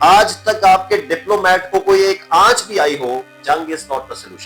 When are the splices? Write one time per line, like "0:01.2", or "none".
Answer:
0:03.3